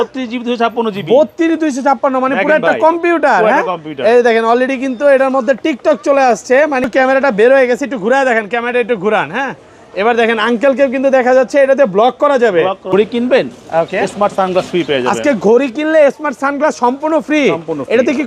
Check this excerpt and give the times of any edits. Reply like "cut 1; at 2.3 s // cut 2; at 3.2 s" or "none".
cut 1; at 6.9 s // cut 2; at 12.9 s